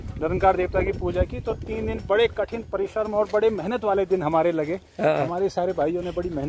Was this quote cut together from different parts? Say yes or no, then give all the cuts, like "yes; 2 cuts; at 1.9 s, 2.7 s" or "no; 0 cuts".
no; 0 cuts